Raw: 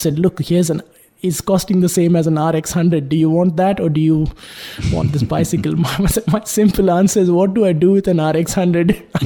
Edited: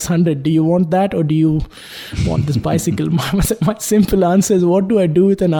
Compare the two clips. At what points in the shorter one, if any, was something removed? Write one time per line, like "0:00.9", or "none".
none